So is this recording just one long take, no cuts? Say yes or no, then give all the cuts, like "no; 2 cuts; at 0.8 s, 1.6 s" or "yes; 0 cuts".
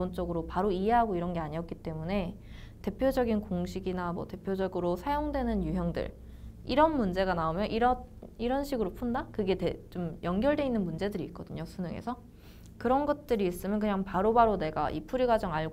yes; 0 cuts